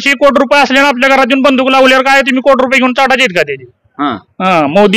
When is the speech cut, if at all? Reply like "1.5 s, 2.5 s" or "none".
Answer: none